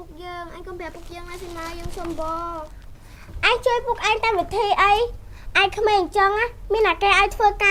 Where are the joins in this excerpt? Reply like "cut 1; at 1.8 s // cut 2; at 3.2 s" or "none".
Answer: none